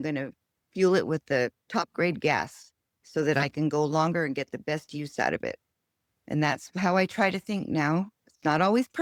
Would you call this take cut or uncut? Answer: uncut